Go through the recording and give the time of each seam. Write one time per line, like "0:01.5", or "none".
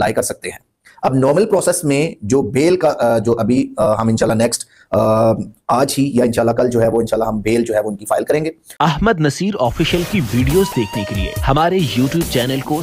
0:08.6